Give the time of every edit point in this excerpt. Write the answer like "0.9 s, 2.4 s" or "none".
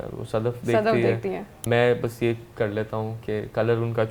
1.5 s